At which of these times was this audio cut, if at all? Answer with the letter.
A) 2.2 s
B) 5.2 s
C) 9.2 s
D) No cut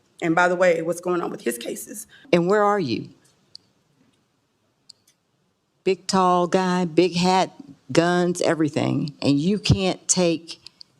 A